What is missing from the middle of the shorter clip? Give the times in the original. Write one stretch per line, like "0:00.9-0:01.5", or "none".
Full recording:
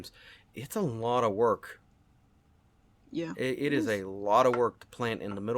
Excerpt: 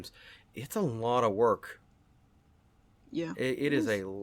none